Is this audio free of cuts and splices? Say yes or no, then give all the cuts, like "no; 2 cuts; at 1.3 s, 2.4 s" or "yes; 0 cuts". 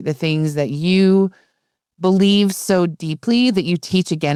yes; 0 cuts